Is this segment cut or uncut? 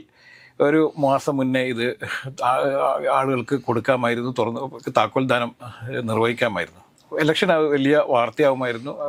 uncut